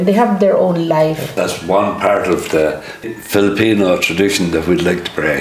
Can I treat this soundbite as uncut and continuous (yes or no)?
no